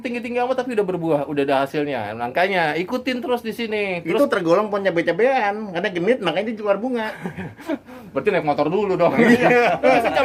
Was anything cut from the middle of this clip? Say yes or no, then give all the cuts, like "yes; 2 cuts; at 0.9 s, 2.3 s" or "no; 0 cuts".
no; 0 cuts